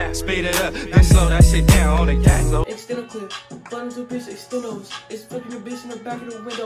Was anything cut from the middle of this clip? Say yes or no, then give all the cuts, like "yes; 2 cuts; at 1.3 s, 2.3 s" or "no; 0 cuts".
yes; 1 cut; at 2.6 s